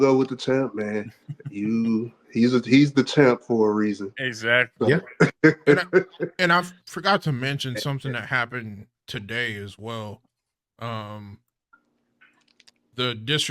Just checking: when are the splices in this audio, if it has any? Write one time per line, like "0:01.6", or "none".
none